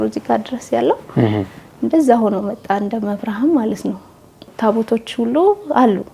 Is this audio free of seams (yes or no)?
no